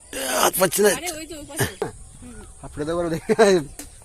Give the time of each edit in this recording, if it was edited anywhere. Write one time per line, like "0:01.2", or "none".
0:01.8

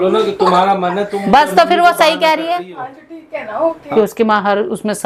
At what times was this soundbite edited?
0:03.8

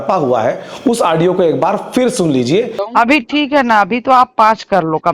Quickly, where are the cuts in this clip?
0:02.8

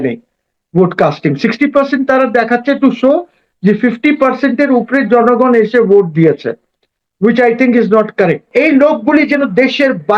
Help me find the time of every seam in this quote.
0:08.5

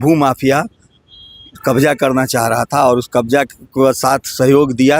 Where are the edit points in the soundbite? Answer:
none

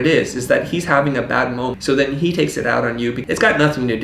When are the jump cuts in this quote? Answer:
0:01.8
0:03.2

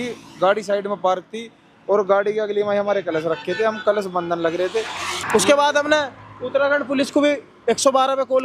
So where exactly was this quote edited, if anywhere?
0:05.2

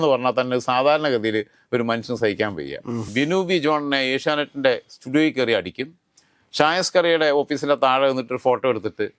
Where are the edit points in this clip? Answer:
0:03.1

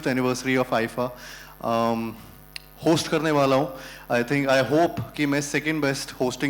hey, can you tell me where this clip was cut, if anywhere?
none

